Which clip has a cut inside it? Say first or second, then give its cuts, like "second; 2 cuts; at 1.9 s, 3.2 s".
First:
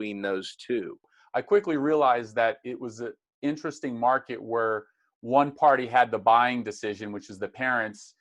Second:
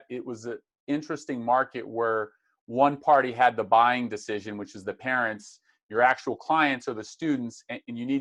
first; 1 cut; at 1.2 s